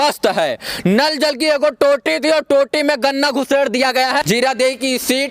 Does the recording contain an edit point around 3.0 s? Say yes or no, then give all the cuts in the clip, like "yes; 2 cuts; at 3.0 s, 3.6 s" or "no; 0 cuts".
no; 1 cut; at 4.2 s